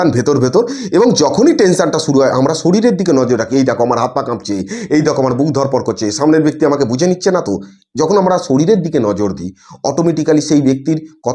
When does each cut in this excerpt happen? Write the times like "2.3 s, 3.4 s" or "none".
none

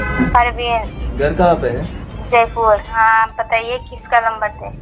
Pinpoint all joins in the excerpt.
2.9 s

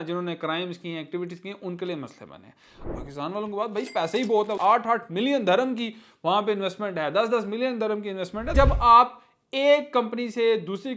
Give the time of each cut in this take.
2.9 s, 4.5 s, 8.5 s

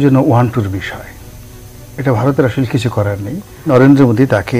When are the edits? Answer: 3.7 s

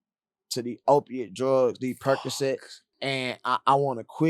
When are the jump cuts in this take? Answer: 2.9 s

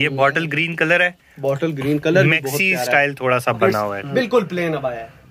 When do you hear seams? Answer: 4.0 s

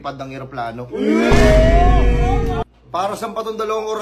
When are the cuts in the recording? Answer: 2.6 s

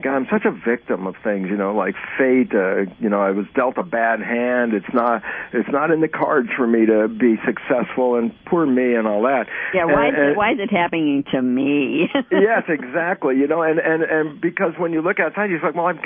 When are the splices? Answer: 6.7 s

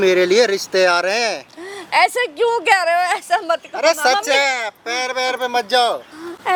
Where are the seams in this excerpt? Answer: none

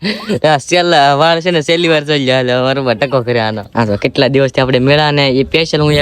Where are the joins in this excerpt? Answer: 3.6 s

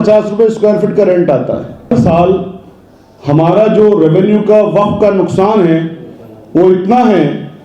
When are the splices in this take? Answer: 1.9 s

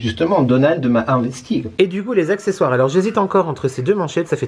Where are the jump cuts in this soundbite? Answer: 1.7 s

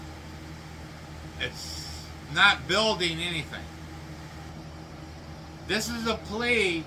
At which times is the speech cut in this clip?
4.5 s

